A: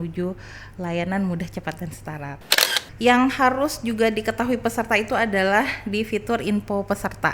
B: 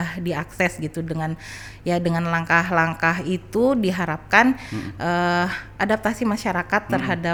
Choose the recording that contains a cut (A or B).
A